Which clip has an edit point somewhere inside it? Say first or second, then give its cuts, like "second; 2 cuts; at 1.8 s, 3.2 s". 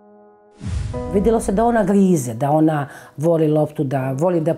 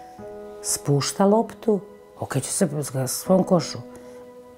first; 1 cut; at 1.1 s